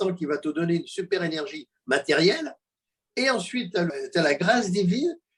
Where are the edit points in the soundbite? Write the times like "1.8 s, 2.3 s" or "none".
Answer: 3.9 s